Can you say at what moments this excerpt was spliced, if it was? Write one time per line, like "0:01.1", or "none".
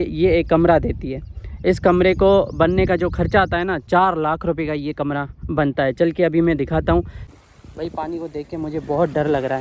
0:07.2